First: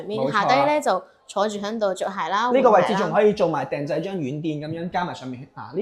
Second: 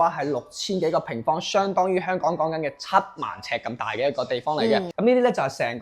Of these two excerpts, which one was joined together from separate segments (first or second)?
second